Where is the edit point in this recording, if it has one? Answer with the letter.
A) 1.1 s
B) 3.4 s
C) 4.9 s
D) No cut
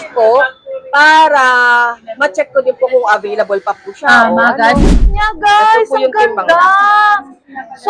C